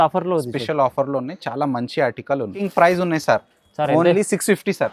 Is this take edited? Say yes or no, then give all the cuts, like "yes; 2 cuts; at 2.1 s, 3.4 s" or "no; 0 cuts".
yes; 1 cut; at 2.6 s